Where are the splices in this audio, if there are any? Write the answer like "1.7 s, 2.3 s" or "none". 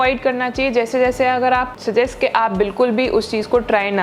1.7 s